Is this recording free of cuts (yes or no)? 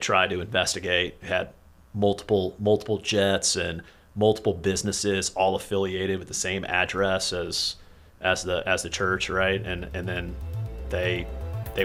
yes